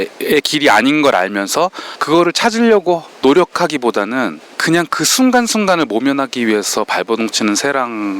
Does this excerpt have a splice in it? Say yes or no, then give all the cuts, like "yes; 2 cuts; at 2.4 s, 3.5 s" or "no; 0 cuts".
yes; 2 cuts; at 1.9 s, 4.5 s